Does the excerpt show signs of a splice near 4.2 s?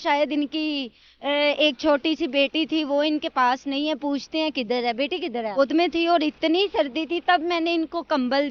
no; 1 cut; at 5.6 s

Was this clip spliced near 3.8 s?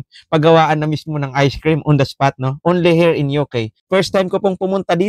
yes; 1 cut; at 3.8 s

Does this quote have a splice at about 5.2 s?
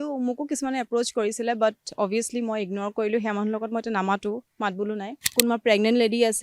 yes; 1 cut; at 5.2 s

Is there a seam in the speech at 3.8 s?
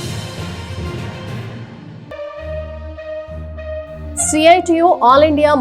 no; 0 cuts

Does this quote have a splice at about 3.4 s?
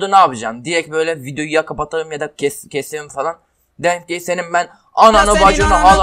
no; 0 cuts

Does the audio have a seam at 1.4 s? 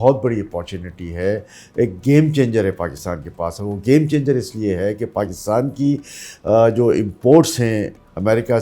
no; 0 cuts

